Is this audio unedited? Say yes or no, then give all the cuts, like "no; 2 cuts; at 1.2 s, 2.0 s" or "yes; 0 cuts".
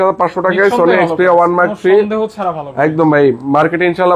yes; 0 cuts